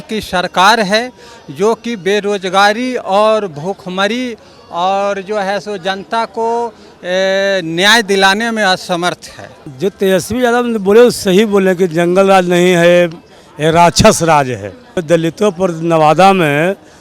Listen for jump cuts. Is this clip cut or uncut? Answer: cut